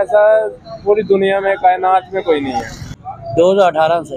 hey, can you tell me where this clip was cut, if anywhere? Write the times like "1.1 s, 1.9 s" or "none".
2.9 s